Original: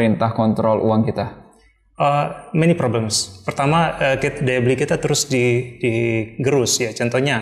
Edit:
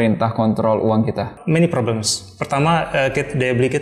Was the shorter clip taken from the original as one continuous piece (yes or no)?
no